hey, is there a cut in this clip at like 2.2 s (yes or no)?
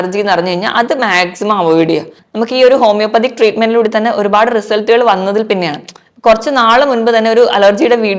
yes